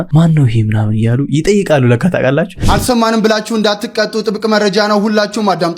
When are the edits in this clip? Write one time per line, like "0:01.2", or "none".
0:02.6